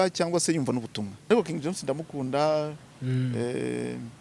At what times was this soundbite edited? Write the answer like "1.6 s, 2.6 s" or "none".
1.3 s